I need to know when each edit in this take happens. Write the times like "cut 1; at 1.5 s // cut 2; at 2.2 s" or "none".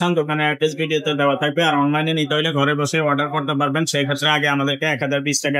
none